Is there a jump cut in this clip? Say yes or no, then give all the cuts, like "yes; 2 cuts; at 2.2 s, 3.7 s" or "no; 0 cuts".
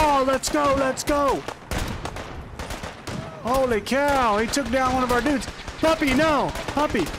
no; 0 cuts